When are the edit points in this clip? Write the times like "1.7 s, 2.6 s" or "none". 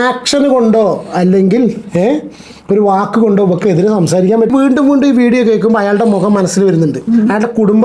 4.5 s